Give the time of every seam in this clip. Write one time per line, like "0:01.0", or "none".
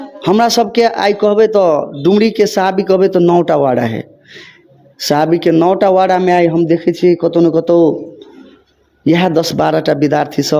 none